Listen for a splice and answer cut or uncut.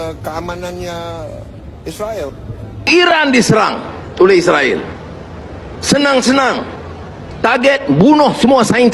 cut